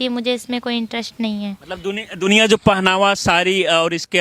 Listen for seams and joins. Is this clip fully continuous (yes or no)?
yes